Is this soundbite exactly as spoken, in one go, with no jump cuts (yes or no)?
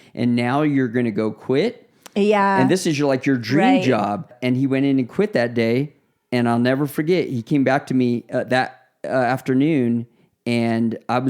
no